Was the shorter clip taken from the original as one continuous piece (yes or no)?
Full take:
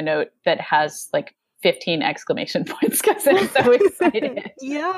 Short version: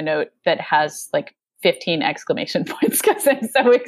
yes